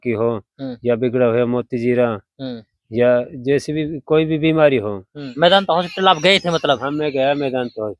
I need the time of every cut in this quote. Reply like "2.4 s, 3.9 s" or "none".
5.3 s